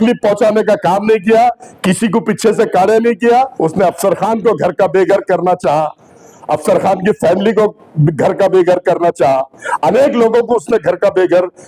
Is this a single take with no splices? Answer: no; 1 cut; at 3.5 s

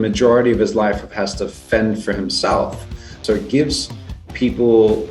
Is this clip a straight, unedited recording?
no; 1 cut; at 3.1 s

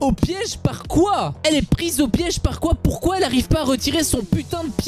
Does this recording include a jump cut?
no; 0 cuts

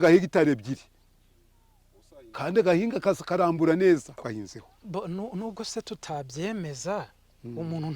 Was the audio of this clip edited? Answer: yes; 1 cut; at 4.1 s

